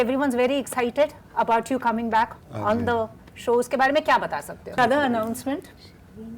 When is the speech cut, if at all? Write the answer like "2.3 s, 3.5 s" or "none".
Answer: 4.8 s